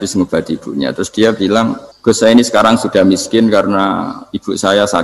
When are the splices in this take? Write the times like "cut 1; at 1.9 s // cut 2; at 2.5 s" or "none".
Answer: cut 1; at 1.9 s

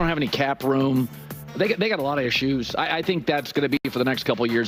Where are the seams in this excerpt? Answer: none

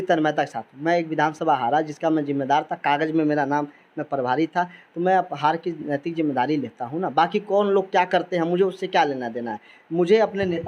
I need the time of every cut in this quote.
none

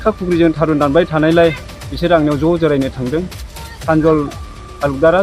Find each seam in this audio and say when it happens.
cut 1; at 3.6 s

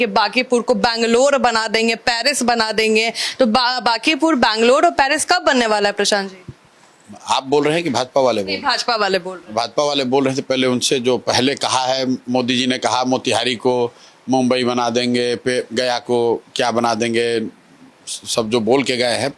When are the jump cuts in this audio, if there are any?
none

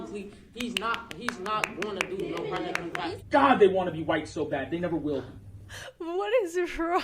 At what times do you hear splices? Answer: cut 1; at 3.1 s

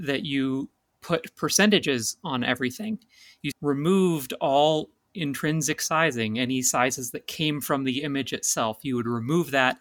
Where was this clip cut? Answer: cut 1; at 3.4 s

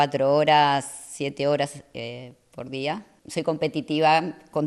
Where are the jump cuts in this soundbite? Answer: cut 1; at 3.1 s

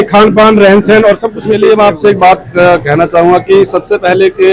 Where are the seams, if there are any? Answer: cut 1; at 1.6 s

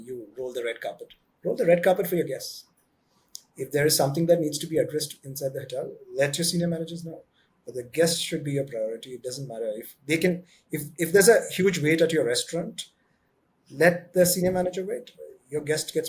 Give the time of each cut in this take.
none

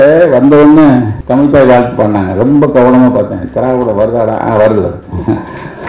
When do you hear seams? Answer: cut 1; at 1.2 s

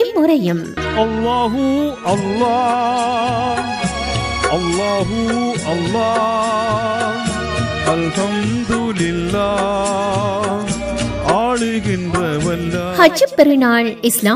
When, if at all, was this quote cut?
none

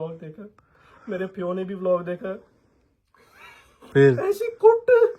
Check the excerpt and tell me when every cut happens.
none

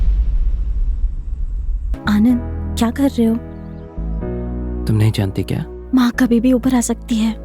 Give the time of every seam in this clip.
cut 1; at 1.9 s

